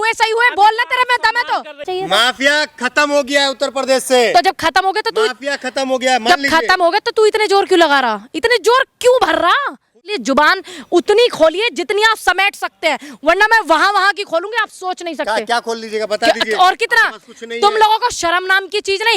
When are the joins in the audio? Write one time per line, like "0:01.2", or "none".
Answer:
0:01.9
0:10.1